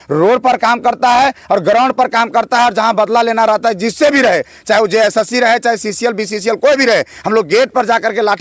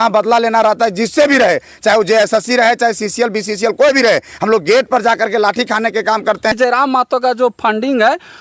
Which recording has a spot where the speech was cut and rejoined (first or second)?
second